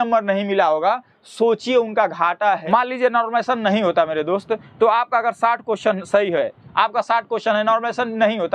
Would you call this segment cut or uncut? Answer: cut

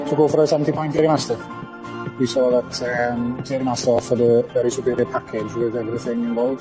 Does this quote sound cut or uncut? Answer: uncut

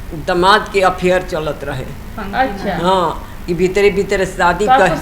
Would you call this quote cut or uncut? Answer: uncut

